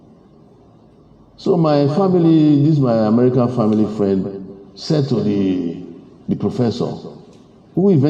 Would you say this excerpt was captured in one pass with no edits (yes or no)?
yes